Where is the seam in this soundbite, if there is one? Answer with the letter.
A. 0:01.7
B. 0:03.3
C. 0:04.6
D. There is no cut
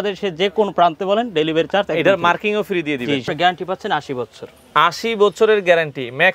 B